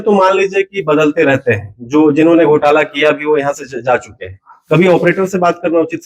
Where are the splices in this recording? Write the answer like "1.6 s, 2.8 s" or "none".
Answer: none